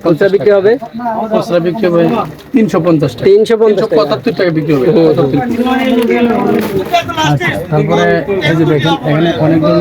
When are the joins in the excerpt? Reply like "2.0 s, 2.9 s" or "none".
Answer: none